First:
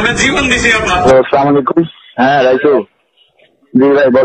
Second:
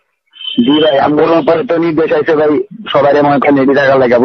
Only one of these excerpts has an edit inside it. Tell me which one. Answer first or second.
first